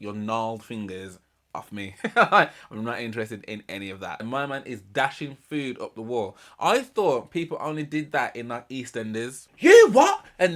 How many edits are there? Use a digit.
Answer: 2